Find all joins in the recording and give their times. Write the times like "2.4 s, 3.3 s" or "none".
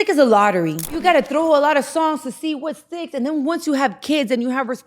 1.0 s